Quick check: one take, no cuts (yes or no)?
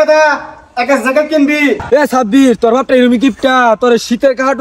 no